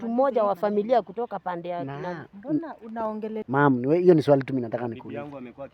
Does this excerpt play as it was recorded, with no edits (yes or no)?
no